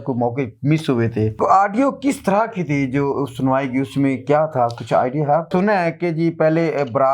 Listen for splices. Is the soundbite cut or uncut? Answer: cut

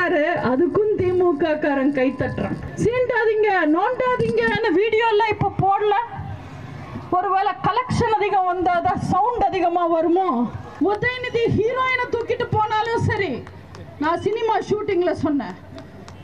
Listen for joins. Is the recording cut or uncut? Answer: cut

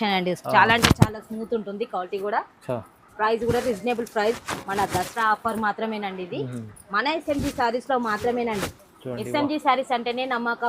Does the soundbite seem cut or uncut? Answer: uncut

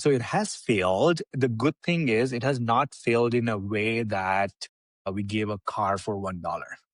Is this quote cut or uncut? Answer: uncut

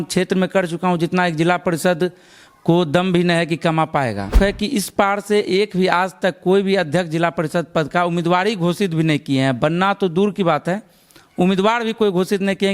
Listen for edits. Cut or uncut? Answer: cut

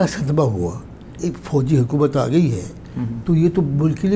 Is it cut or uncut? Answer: cut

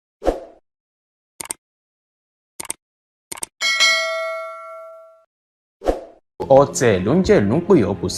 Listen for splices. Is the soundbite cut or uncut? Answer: uncut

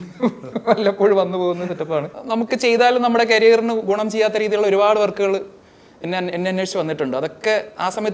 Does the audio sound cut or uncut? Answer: cut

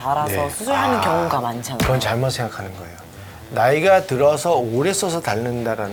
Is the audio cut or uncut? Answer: uncut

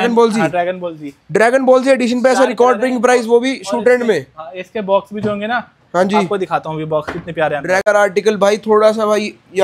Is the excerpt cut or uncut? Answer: cut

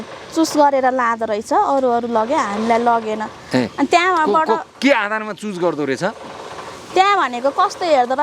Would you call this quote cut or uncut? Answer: uncut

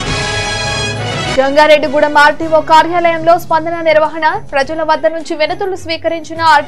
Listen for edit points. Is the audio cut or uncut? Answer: cut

